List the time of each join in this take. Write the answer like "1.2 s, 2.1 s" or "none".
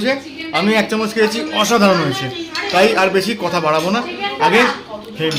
none